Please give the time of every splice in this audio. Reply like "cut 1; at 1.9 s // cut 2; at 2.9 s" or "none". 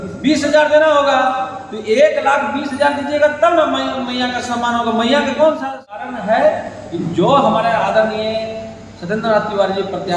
cut 1; at 5.8 s